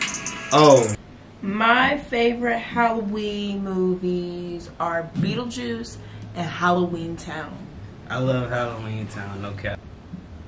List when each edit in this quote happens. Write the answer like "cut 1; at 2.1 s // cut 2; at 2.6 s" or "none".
cut 1; at 1.0 s // cut 2; at 9.8 s